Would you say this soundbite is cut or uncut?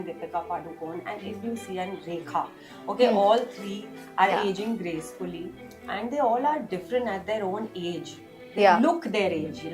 uncut